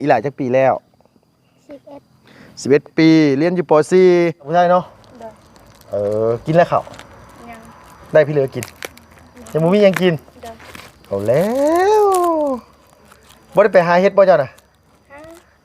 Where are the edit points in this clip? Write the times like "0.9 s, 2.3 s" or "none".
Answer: 4.5 s